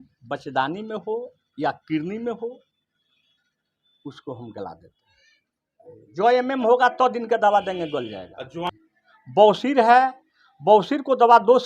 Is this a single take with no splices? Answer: no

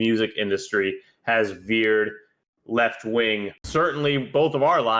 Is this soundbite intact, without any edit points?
no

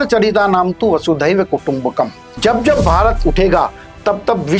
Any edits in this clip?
yes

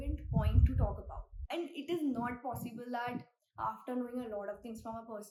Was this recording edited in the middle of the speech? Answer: no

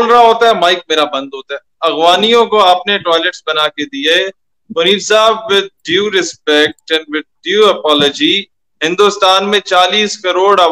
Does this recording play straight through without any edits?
yes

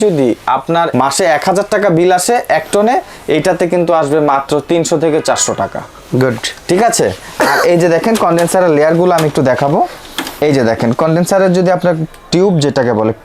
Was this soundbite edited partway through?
no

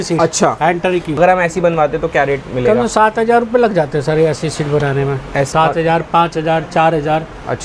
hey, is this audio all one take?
no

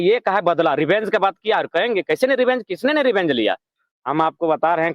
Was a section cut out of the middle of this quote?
yes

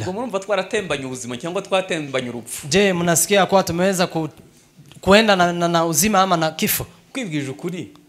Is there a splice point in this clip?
yes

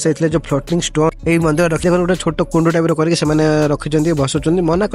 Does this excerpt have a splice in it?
yes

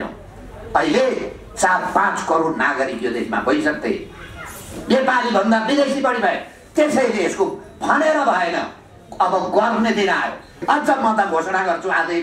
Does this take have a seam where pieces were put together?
yes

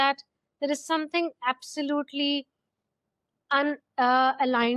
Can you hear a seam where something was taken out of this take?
no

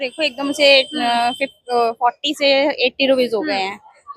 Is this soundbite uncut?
yes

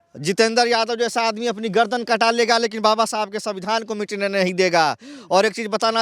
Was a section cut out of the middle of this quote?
no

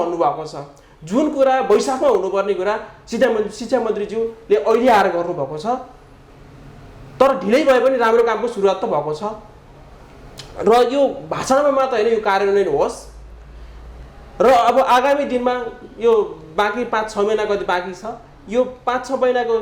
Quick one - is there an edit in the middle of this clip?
no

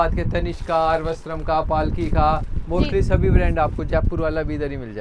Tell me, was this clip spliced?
no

